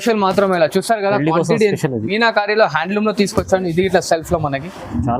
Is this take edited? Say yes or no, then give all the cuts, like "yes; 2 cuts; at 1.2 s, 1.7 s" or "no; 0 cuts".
yes; 1 cut; at 2.1 s